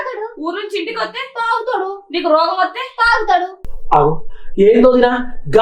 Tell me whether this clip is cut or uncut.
cut